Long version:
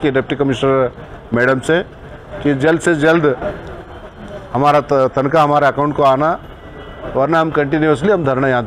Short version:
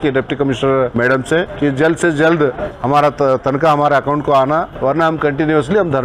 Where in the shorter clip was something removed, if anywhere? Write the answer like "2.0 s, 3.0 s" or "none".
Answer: 1.1 s, 2.7 s, 4.7 s